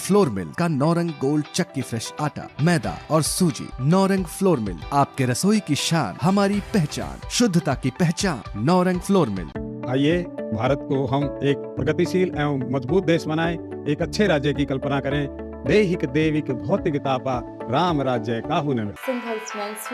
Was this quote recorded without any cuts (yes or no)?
yes